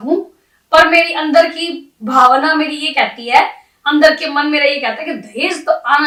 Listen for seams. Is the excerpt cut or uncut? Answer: uncut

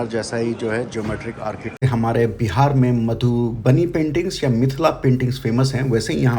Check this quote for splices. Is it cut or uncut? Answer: cut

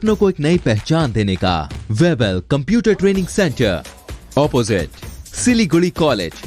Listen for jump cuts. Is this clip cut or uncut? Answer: cut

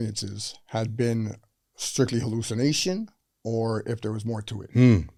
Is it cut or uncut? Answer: uncut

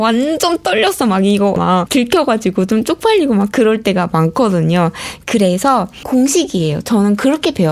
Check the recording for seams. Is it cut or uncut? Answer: uncut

